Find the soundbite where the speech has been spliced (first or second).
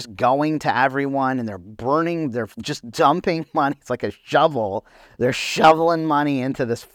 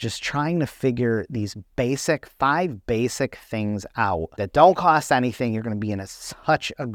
second